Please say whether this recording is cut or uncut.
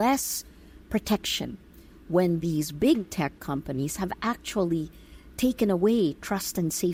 uncut